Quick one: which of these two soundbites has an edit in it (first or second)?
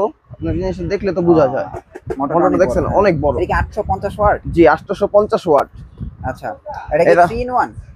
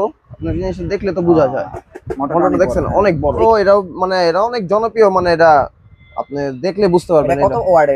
second